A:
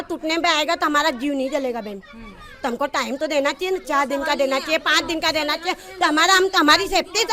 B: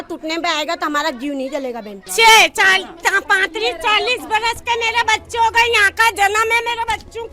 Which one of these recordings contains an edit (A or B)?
B